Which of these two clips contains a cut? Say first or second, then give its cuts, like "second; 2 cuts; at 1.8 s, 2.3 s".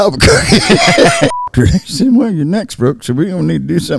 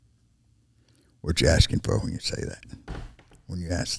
first; 1 cut; at 1.4 s